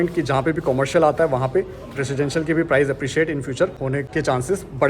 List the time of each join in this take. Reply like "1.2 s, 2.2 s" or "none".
3.9 s